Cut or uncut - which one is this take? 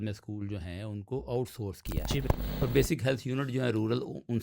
cut